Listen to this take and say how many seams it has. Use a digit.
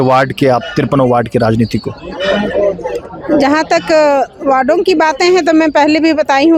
0